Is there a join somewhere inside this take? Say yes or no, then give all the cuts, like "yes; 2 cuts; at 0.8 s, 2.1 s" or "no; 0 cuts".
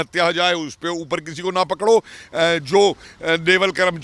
no; 0 cuts